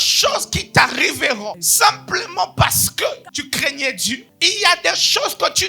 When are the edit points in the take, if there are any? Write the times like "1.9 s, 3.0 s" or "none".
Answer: 1.6 s, 3.3 s, 4.2 s